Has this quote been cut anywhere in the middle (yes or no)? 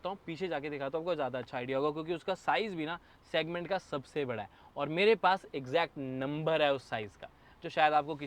no